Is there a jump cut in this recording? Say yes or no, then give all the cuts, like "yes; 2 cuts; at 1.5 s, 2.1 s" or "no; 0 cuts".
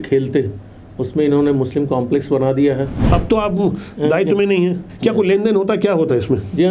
yes; 1 cut; at 3.0 s